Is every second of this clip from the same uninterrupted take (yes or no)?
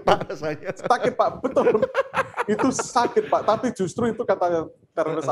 yes